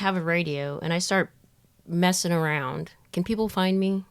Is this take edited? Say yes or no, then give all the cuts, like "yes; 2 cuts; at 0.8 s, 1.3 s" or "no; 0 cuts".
no; 0 cuts